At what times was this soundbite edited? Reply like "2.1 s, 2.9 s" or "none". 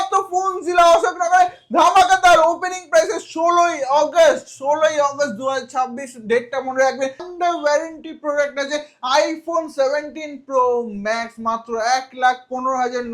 7.3 s